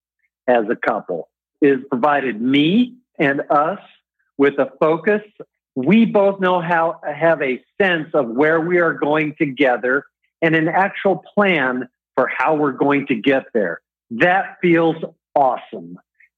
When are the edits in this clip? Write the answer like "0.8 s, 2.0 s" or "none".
1.5 s, 3.1 s, 5.4 s